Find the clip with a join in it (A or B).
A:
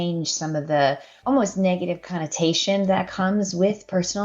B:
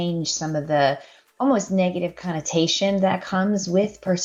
A